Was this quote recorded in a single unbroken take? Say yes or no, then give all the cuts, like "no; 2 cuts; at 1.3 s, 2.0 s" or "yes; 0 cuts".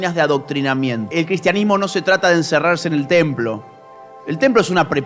no; 1 cut; at 1.0 s